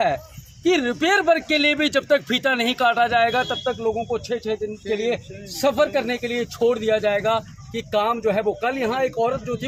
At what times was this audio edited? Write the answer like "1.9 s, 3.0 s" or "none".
none